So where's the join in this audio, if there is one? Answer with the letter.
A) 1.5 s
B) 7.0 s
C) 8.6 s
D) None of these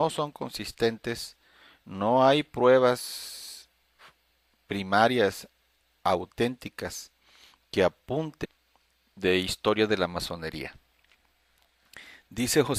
D